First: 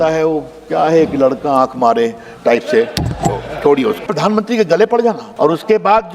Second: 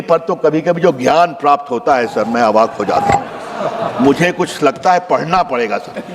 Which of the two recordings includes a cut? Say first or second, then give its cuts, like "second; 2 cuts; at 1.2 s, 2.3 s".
first; 2 cuts; at 4.1 s, 5.3 s